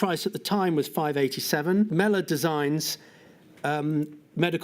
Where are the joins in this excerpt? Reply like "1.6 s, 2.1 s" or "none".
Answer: 1.9 s